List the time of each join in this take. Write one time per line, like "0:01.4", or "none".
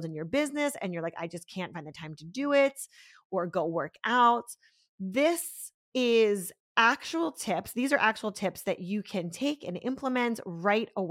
none